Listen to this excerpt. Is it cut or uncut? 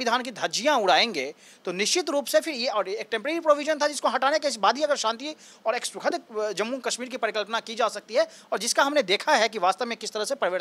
uncut